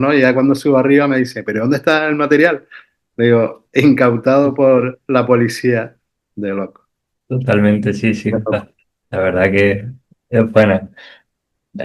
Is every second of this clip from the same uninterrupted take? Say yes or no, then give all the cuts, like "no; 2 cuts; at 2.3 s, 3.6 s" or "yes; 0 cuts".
yes; 0 cuts